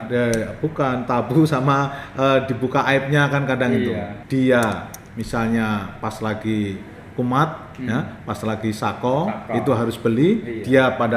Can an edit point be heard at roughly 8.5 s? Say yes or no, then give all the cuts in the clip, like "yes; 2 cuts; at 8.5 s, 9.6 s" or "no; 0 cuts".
no; 1 cut; at 4.1 s